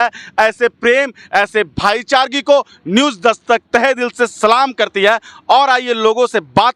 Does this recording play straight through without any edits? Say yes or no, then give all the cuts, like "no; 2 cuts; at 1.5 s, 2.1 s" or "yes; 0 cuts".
yes; 0 cuts